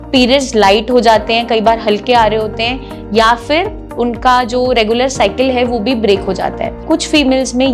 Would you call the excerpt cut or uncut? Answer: cut